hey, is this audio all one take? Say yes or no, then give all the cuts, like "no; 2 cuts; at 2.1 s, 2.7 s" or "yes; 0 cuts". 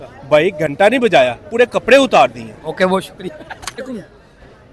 yes; 0 cuts